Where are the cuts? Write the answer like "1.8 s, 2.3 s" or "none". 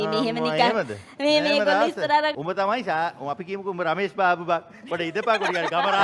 2.3 s